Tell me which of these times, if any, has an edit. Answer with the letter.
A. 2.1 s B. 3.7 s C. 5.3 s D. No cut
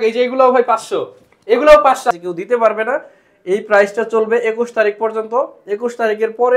A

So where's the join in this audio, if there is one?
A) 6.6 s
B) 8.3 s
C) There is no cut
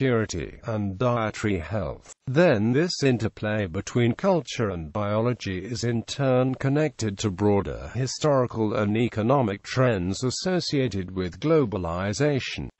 A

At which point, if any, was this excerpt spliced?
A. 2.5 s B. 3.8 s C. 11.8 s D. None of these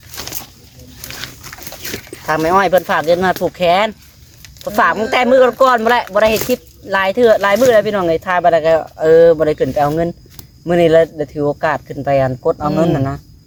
D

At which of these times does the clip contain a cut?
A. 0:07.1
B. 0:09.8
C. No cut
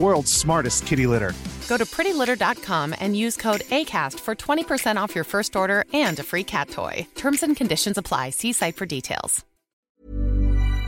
B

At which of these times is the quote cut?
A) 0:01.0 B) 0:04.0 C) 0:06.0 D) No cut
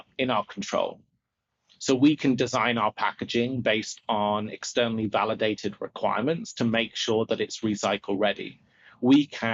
D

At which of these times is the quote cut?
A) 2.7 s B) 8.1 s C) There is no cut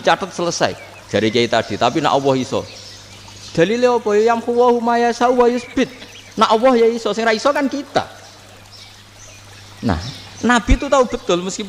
C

